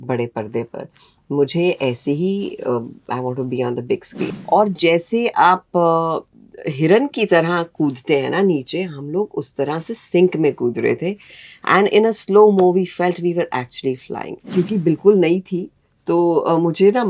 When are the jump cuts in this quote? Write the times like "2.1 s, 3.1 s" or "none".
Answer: 4.2 s, 14.4 s

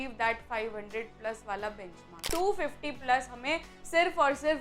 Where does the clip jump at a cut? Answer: 2.2 s

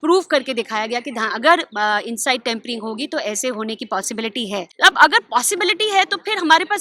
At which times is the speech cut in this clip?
4.7 s

